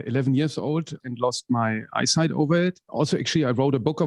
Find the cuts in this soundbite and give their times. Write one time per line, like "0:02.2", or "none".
0:01.0
0:02.9